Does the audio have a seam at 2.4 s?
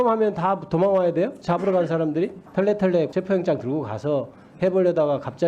yes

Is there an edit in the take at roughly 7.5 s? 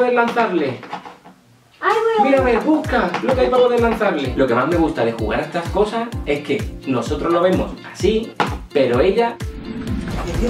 no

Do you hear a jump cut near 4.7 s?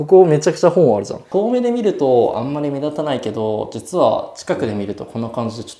no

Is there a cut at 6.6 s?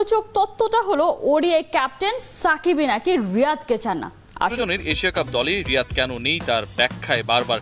no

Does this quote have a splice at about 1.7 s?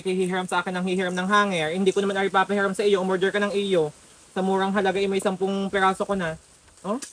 yes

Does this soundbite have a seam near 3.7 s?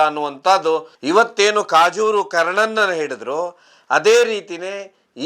no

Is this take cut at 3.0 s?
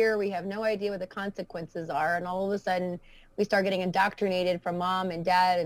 no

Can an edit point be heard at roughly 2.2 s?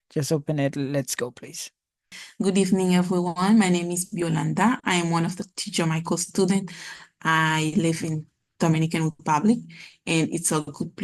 yes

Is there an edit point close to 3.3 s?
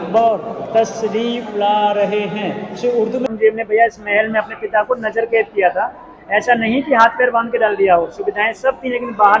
yes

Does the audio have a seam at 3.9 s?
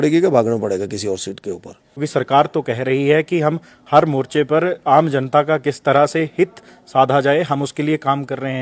no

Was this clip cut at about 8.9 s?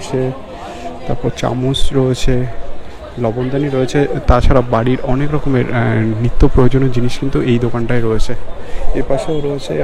no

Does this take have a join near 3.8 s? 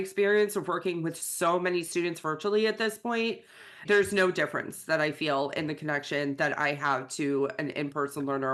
yes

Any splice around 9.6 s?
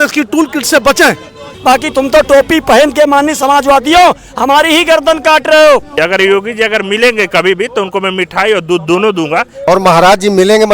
yes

